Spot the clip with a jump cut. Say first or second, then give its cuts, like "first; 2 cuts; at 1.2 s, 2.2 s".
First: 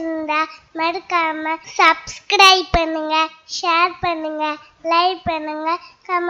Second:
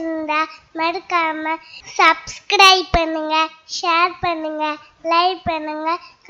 first; 1 cut; at 1.6 s